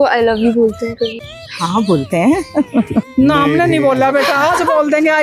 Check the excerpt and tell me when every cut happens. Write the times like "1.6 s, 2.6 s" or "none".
1.1 s, 3.1 s